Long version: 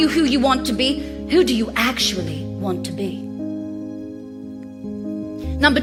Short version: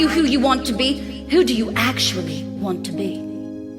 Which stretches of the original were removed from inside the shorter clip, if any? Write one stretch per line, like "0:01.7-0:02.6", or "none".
0:02.5-0:03.0